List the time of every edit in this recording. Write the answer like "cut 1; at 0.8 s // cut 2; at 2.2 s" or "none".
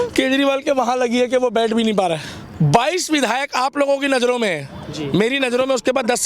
cut 1; at 2.4 s

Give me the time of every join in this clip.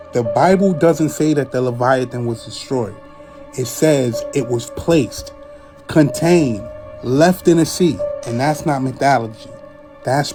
none

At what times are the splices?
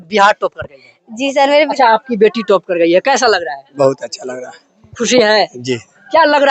cut 1; at 1.7 s

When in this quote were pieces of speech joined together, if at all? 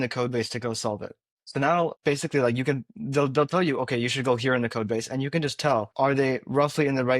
cut 1; at 1.8 s // cut 2; at 5.9 s

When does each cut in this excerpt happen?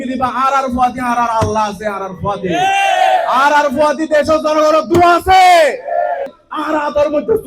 cut 1; at 6.3 s

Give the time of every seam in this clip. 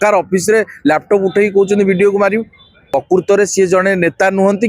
cut 1; at 2.8 s

